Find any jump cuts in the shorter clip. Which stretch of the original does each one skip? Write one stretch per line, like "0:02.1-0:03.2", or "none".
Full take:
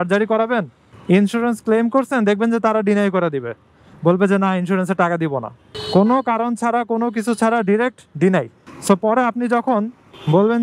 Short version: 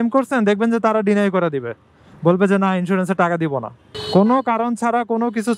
none

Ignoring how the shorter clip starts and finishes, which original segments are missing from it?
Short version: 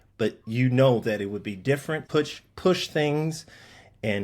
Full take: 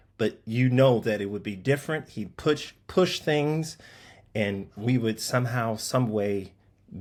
0:02.0-0:02.3

